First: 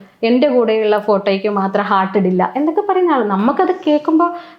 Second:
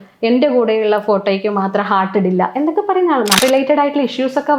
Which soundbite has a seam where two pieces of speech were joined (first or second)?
second